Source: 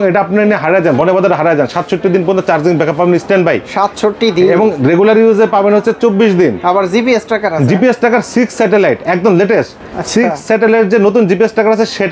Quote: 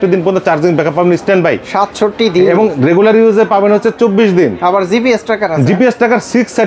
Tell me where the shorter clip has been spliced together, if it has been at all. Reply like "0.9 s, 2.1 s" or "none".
none